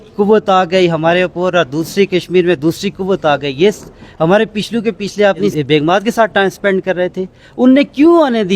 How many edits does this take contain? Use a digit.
1